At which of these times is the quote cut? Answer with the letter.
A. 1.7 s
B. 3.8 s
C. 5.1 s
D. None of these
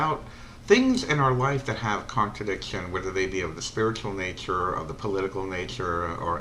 B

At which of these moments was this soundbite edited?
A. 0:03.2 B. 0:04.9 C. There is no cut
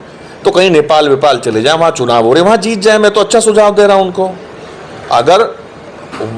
C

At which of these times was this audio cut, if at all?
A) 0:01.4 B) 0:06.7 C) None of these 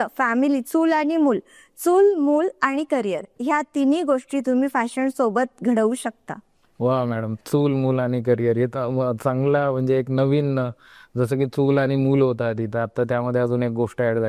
C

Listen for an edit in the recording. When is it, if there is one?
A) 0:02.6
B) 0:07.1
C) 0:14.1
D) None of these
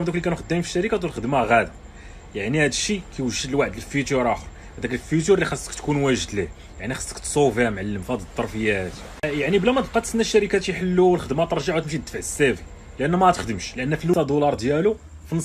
C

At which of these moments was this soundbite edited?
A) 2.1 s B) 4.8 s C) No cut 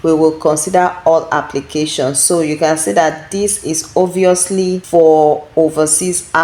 B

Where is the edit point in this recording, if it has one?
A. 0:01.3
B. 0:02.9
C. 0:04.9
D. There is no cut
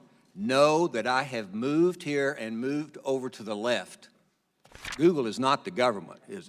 C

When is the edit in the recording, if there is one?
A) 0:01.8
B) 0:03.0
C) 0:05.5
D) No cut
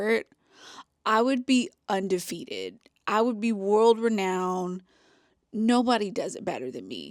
D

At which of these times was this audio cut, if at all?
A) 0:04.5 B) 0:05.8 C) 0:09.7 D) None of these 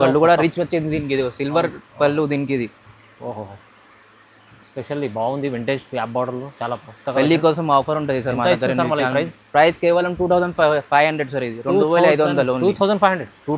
D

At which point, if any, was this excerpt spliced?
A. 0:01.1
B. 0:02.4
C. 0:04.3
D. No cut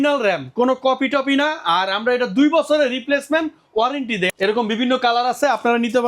C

